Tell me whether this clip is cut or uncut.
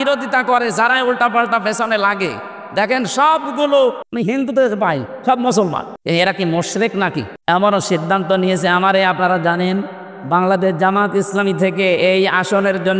cut